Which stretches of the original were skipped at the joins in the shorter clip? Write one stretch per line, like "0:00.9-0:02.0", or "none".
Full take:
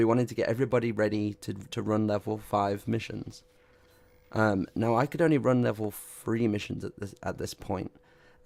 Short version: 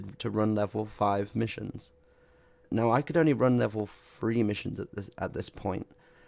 0:04.2-0:04.7